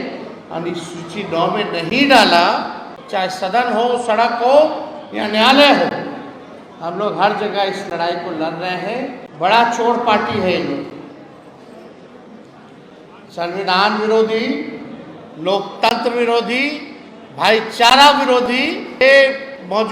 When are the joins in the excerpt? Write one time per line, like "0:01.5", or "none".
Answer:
0:02.9
0:09.2
0:19.0